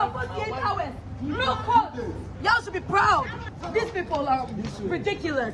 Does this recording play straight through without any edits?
no; 2 cuts; at 2.2 s, 3.6 s

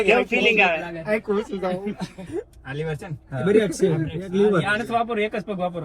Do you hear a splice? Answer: yes; 1 cut; at 2.2 s

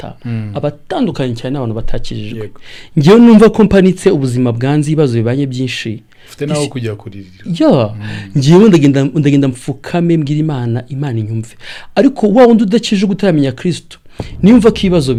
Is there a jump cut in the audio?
no; 0 cuts

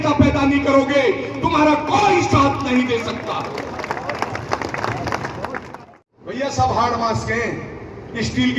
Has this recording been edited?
yes; 1 cut; at 5.7 s

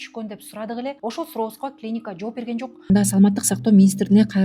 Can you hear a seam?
yes; 2 cuts; at 1.0 s, 2.9 s

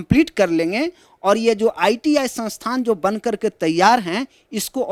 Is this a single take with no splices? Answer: yes; 0 cuts

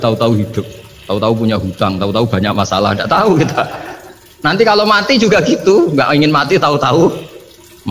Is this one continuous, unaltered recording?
yes; 0 cuts

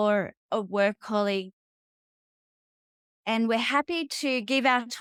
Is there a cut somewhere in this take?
no; 0 cuts

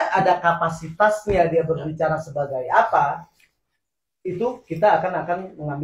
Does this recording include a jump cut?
no; 0 cuts

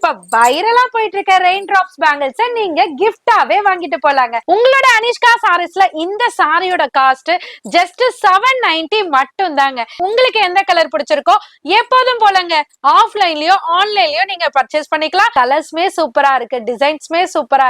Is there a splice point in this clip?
yes; 3 cuts; at 4.4 s, 9.9 s, 15.3 s

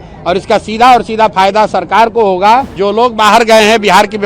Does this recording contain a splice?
yes; 1 cut; at 2.8 s

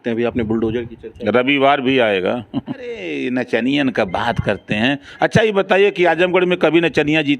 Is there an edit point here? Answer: yes; 1 cut; at 3.1 s

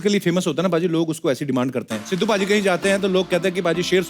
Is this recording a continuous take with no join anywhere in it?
no; 1 cut; at 2.0 s

